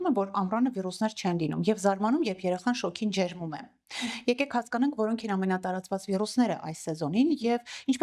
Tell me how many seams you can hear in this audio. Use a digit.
0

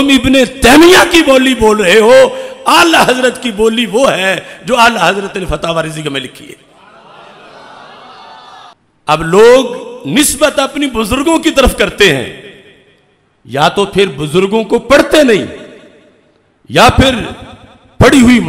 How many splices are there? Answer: 1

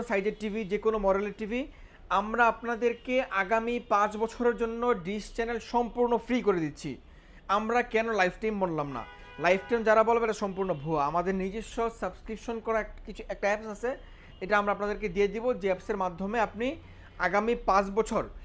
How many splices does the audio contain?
0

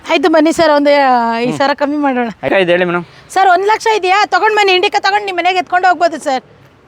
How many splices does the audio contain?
1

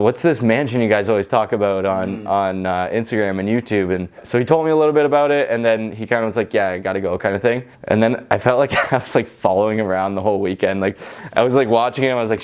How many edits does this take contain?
2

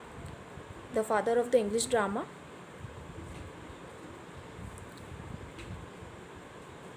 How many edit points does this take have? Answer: 0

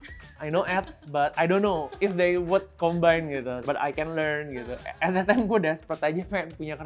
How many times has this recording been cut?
1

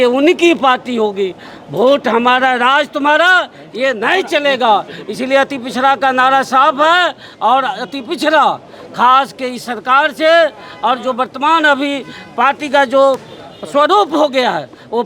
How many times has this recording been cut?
0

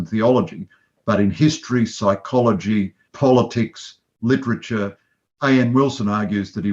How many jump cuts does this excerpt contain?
1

